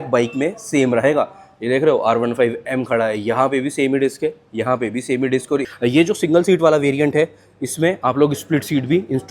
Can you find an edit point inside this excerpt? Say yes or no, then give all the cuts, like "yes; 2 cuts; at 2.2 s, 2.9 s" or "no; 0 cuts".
yes; 1 cut; at 5.7 s